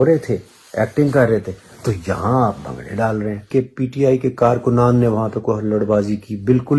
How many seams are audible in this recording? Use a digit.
1